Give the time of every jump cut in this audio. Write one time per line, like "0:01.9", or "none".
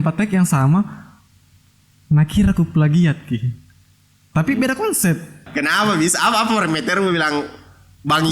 0:05.5